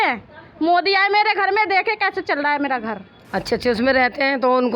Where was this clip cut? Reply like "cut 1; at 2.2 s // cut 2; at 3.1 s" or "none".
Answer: cut 1; at 3.1 s